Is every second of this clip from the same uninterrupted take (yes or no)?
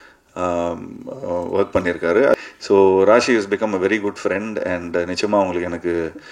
no